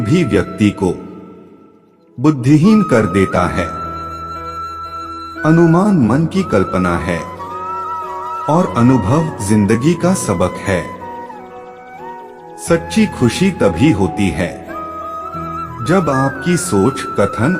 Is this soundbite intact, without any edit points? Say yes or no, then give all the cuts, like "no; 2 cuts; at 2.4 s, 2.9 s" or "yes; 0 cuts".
no; 2 cuts; at 4.0 s, 5.4 s